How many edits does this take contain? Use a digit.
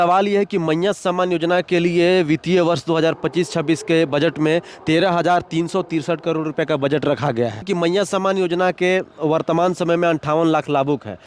1